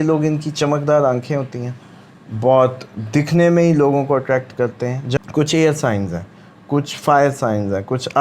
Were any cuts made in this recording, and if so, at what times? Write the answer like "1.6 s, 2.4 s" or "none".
5.2 s